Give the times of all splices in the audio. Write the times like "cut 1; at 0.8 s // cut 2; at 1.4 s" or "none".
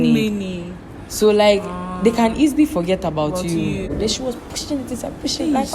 cut 1; at 3.9 s